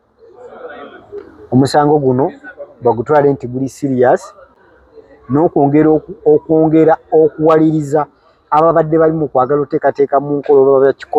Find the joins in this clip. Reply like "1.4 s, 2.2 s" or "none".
none

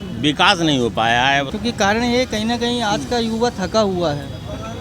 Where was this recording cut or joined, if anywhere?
1.5 s

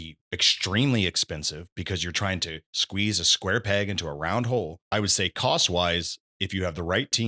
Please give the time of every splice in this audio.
4.8 s

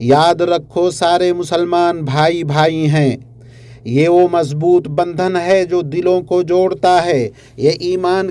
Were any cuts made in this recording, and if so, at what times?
none

